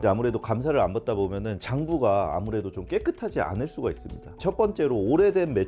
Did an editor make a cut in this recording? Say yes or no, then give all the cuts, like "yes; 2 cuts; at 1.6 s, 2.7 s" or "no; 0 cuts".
no; 0 cuts